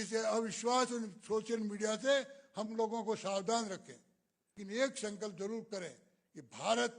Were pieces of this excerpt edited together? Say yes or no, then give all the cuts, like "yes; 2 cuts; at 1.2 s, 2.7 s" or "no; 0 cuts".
yes; 1 cut; at 4.6 s